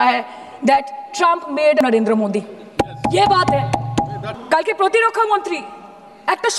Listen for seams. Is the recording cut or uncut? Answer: uncut